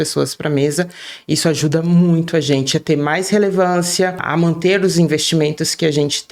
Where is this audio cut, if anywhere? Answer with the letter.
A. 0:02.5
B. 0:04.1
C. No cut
C